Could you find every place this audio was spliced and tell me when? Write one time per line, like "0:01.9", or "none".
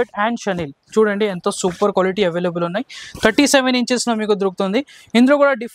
none